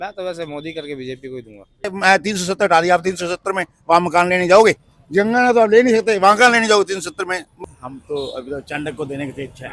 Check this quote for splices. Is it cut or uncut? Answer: cut